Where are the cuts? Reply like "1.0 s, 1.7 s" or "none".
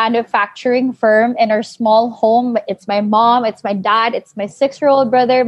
none